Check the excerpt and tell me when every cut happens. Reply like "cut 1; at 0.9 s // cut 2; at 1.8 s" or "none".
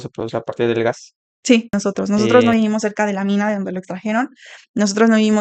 cut 1; at 1.7 s